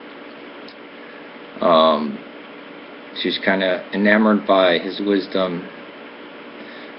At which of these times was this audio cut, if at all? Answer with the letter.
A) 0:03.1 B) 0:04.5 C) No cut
B